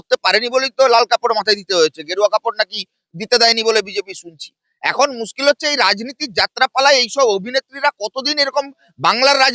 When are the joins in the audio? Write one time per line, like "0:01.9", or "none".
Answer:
none